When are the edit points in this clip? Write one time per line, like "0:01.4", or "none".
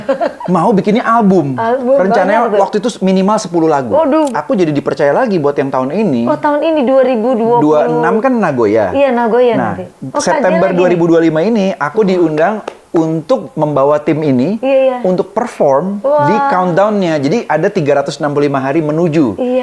0:04.3